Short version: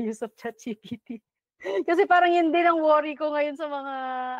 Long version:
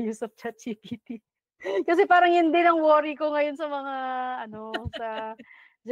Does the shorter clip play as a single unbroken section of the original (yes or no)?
yes